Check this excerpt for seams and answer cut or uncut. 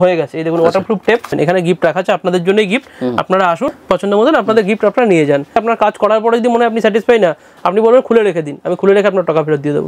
cut